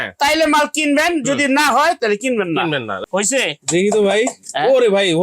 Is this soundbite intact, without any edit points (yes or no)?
no